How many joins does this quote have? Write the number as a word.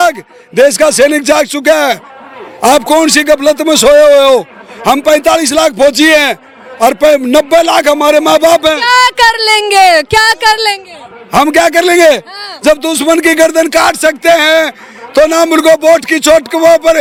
zero